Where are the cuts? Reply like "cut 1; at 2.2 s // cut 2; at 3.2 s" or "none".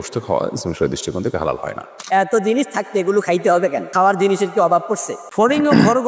cut 1; at 2.0 s // cut 2; at 3.8 s // cut 3; at 5.2 s